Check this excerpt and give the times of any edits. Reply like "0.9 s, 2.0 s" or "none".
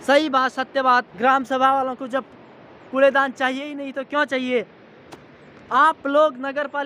1.1 s